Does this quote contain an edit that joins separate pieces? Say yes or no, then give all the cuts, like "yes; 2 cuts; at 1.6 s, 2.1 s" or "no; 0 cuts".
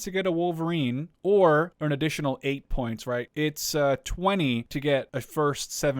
yes; 4 cuts; at 1.1 s, 1.7 s, 3.3 s, 4.9 s